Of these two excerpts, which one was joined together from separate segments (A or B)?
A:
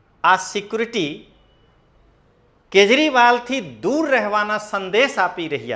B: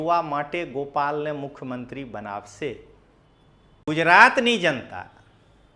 B